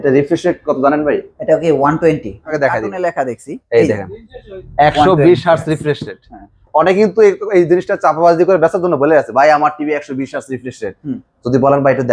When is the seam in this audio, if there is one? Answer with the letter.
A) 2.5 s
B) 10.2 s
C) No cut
A